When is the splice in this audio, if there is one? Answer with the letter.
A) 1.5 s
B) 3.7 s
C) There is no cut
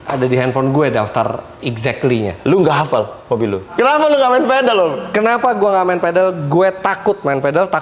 B